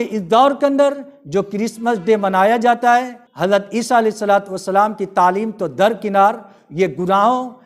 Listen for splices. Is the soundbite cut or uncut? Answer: cut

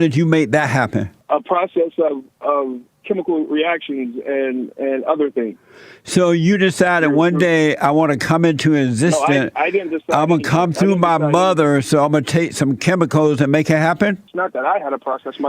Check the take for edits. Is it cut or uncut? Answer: cut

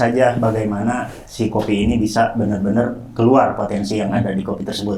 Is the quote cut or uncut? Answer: uncut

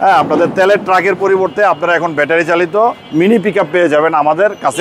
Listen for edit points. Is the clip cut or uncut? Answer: cut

